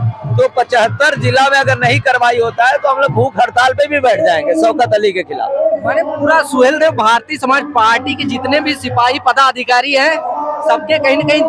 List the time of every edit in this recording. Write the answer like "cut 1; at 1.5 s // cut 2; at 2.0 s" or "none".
none

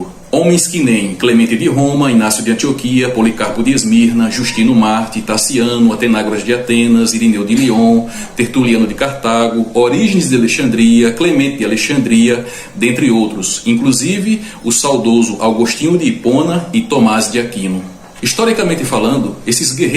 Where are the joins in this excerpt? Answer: cut 1; at 9.0 s

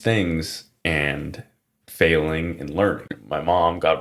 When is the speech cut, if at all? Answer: cut 1; at 3.1 s

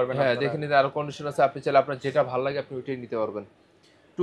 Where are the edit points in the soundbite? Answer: none

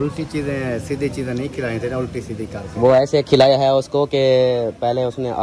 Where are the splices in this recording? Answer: none

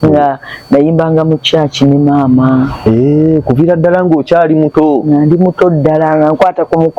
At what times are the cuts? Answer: none

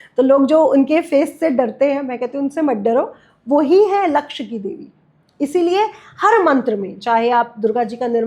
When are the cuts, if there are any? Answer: none

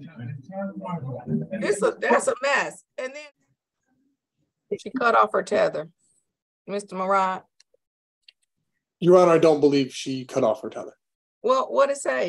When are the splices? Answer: cut 1; at 3.0 s

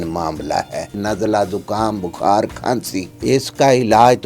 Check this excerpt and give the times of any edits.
cut 1; at 1.0 s // cut 2; at 3.1 s

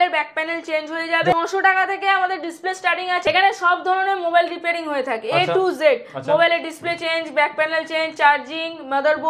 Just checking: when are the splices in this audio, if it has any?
cut 1; at 1.3 s // cut 2; at 3.2 s

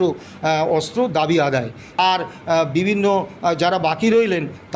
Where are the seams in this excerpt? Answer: cut 1; at 2.0 s

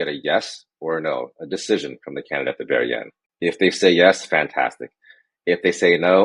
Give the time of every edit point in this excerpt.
cut 1; at 3.2 s

